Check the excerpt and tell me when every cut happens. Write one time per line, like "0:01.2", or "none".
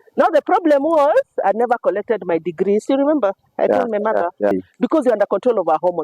0:04.5